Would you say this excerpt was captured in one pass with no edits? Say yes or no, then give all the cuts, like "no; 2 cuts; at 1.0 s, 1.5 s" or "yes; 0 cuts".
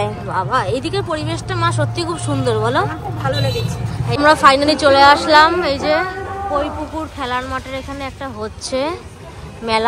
no; 1 cut; at 4.2 s